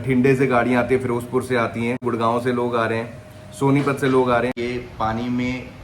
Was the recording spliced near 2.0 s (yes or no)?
yes